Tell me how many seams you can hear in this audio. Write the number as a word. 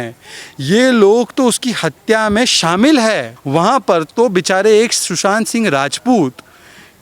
one